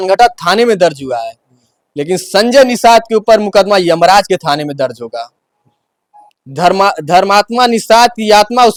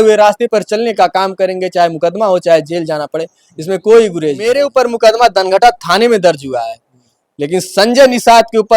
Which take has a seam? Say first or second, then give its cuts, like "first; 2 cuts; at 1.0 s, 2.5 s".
second; 1 cut; at 4.4 s